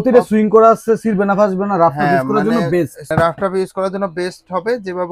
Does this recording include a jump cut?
yes; 1 cut; at 3.0 s

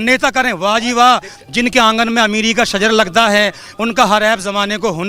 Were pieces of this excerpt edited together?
no; 0 cuts

